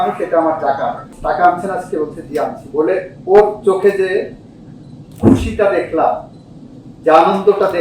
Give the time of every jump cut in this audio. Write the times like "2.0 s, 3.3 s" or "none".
1.1 s